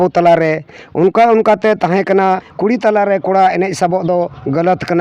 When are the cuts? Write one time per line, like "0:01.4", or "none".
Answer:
0:02.5